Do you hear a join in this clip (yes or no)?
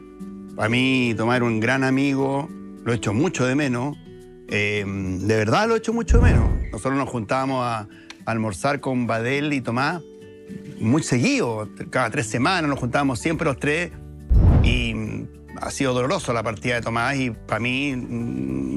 no